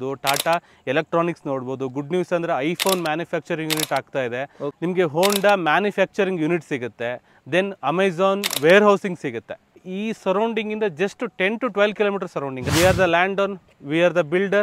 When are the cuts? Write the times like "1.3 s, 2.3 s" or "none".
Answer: 4.8 s, 9.9 s, 12.7 s